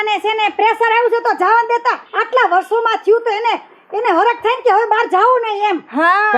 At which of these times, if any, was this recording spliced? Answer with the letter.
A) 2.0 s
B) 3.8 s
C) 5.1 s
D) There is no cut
D